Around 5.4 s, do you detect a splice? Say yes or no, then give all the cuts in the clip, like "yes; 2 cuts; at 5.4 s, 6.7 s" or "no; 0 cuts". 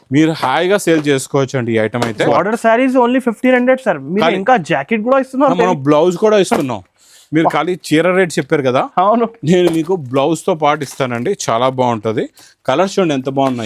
no; 1 cut; at 2.3 s